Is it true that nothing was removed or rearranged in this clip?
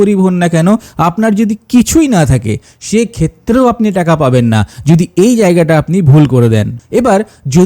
no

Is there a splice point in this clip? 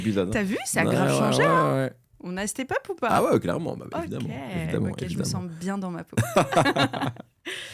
no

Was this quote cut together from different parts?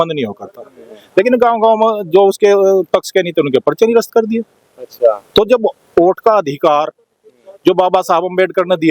no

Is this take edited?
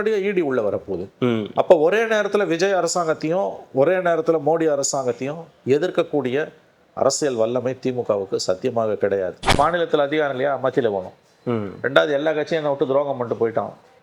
yes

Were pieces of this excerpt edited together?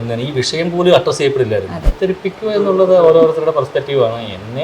yes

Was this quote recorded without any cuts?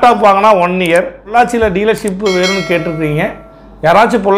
no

